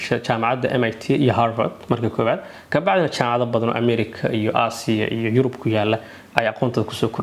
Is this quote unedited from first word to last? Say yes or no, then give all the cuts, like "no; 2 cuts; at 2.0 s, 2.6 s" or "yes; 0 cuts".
yes; 0 cuts